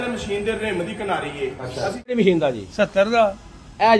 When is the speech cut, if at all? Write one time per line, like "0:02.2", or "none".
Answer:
0:02.1

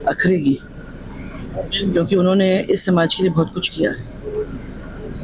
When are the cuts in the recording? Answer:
none

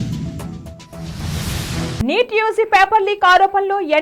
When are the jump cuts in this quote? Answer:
0:02.0

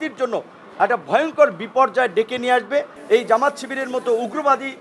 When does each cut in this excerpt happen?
0:03.0

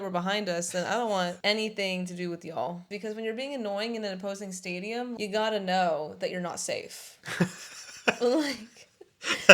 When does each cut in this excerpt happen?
0:01.4
0:02.9
0:05.2

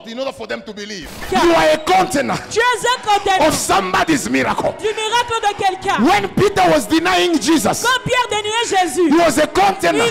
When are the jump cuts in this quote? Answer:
0:01.2

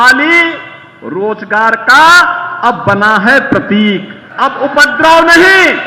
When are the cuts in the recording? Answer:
0:04.2

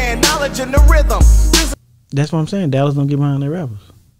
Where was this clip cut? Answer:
0:01.8

